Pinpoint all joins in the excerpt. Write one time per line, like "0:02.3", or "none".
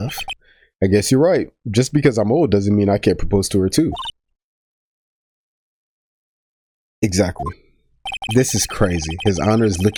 none